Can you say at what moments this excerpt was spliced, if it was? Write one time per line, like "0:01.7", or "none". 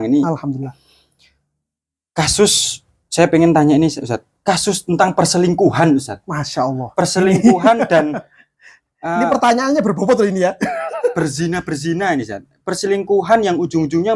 none